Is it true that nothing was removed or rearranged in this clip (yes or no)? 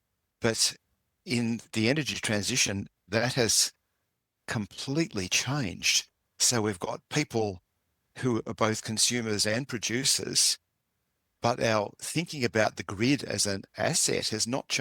yes